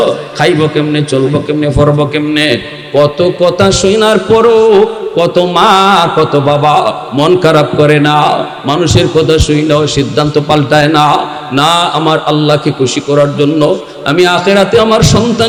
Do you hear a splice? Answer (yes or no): no